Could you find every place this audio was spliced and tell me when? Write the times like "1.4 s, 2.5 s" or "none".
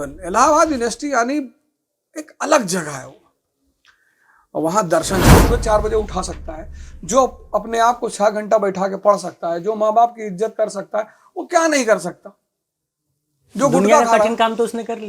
5.3 s